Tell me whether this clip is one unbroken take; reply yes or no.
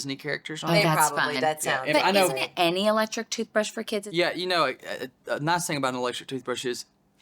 no